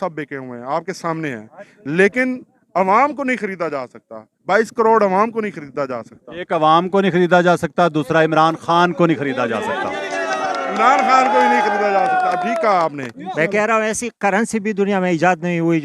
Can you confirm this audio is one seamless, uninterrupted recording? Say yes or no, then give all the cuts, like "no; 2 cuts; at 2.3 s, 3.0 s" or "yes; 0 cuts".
yes; 0 cuts